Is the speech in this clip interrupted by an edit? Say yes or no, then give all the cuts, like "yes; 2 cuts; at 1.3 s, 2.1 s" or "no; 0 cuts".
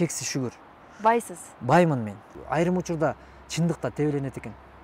yes; 1 cut; at 2.3 s